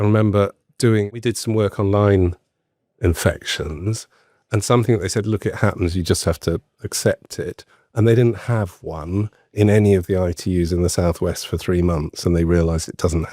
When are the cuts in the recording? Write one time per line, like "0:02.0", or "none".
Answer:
0:01.1